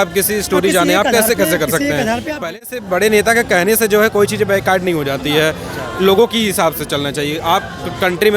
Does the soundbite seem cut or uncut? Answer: cut